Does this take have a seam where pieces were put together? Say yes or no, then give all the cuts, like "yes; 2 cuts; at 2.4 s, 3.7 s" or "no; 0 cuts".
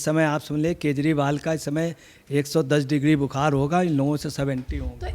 no; 0 cuts